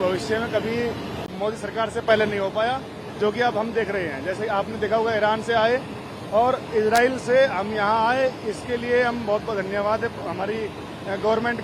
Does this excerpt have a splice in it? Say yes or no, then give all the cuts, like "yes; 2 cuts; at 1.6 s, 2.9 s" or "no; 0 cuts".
no; 0 cuts